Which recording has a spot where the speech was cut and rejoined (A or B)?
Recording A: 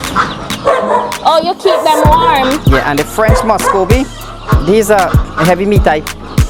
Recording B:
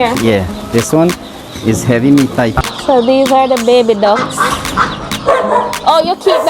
B